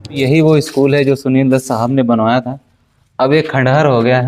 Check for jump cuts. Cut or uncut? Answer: uncut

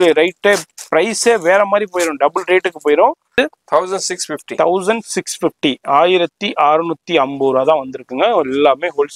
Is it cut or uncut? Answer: cut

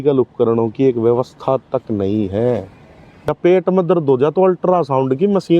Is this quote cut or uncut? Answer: cut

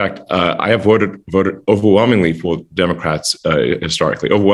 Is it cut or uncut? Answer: uncut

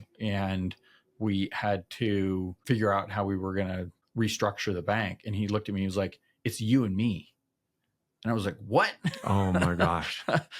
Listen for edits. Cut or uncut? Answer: cut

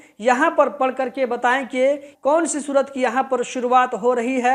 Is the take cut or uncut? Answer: cut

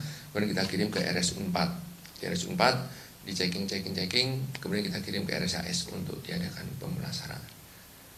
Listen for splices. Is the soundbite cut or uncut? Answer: uncut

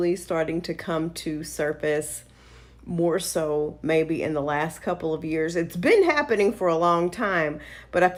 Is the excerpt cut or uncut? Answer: uncut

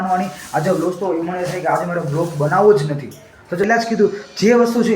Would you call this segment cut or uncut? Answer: cut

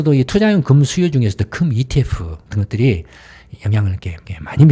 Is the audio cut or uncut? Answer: cut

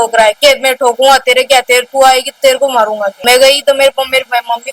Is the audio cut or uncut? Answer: uncut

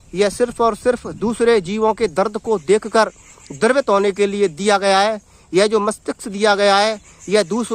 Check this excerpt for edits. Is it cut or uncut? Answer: uncut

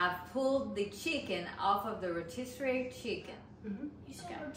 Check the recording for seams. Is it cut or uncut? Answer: cut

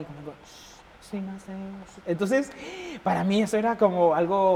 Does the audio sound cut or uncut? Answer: uncut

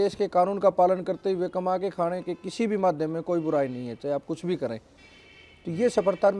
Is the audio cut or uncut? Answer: uncut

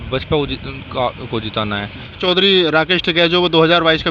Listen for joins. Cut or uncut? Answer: cut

